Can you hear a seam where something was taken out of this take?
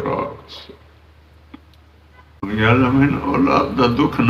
yes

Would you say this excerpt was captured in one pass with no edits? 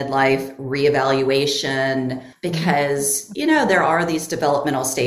no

